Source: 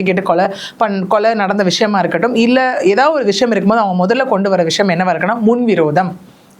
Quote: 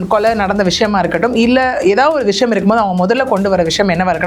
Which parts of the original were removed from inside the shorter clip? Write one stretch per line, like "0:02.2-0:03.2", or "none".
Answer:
none